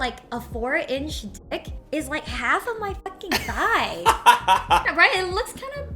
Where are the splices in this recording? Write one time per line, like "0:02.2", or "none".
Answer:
0:04.8